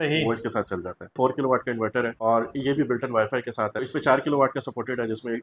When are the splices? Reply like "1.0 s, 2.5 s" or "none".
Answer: 1.1 s, 2.1 s, 3.8 s